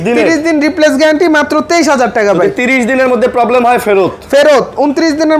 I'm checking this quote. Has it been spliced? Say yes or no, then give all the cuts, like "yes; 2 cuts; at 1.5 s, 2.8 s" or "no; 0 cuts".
no; 0 cuts